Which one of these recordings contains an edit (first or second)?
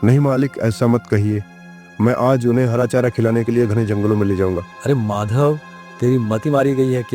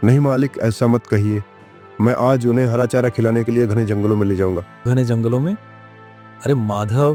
first